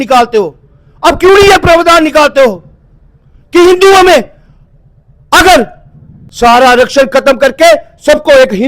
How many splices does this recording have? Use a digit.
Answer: 1